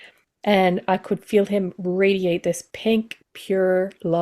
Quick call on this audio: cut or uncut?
uncut